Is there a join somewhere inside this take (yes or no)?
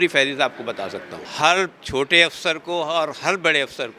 yes